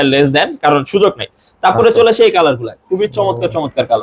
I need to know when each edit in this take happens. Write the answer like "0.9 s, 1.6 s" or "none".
none

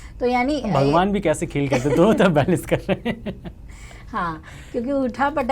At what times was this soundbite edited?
none

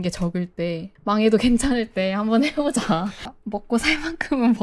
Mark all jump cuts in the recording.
0.9 s, 3.3 s

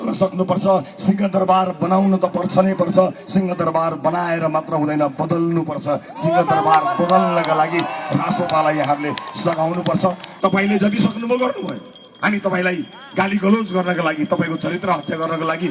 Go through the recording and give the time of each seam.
10.3 s

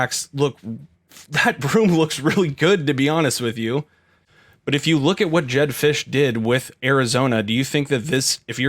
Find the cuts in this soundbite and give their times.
4.4 s

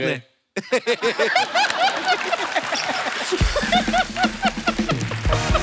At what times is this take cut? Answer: none

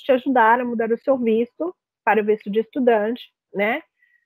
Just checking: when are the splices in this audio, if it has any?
none

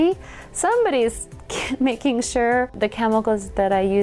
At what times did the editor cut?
2.7 s

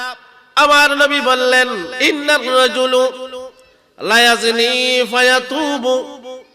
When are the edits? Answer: 1.9 s

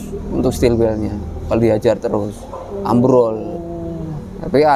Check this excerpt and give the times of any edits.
none

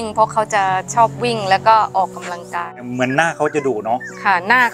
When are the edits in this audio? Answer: 2.9 s

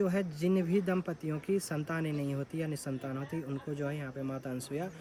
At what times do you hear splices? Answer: none

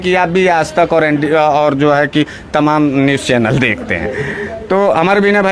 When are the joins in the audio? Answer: none

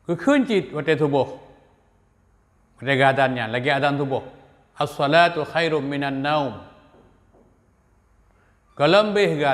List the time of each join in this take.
none

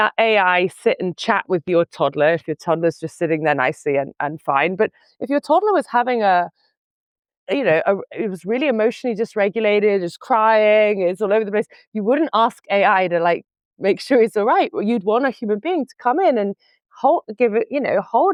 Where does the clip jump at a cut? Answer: none

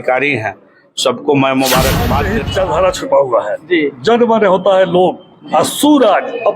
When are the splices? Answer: 2.4 s

